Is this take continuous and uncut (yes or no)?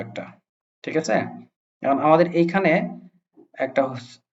yes